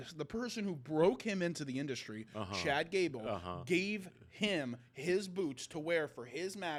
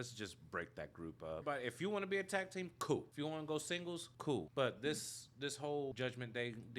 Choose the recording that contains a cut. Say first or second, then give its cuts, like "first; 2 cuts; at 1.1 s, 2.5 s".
second; 4 cuts; at 1.4 s, 3.1 s, 4.3 s, 5.9 s